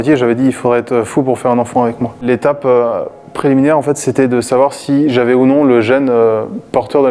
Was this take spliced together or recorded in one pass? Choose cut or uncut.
uncut